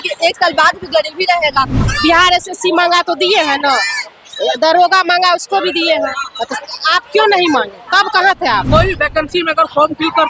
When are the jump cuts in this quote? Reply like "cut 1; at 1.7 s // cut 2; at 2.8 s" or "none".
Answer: cut 1; at 1.8 s // cut 2; at 8.6 s